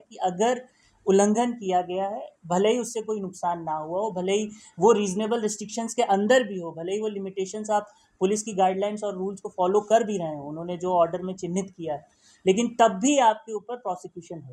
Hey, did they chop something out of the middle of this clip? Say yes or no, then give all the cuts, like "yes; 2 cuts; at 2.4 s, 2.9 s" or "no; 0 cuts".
no; 0 cuts